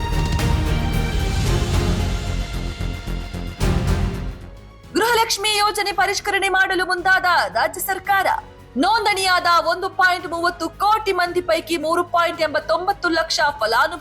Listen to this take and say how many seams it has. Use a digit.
1